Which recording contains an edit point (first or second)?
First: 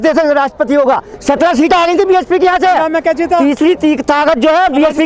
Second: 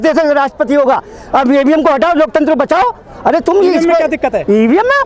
first